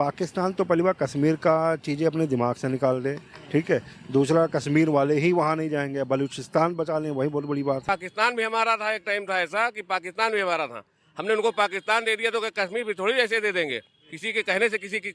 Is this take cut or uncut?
cut